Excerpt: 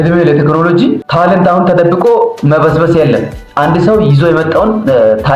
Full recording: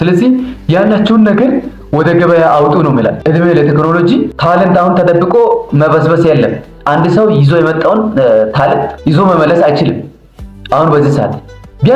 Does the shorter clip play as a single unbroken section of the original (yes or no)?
yes